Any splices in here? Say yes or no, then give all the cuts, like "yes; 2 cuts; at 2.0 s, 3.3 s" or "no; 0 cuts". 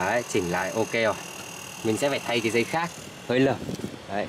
no; 0 cuts